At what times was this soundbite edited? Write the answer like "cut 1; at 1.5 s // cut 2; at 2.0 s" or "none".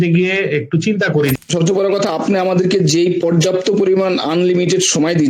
cut 1; at 1.3 s